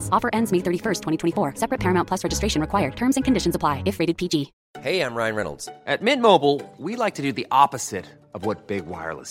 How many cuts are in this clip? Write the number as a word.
one